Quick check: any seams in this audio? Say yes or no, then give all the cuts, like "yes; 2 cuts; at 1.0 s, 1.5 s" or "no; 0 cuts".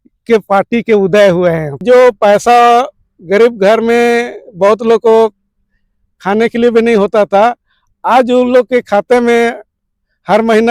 yes; 1 cut; at 1.8 s